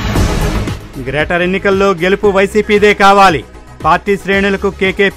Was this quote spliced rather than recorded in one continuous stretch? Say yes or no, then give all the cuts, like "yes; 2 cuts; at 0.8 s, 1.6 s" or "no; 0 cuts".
no; 0 cuts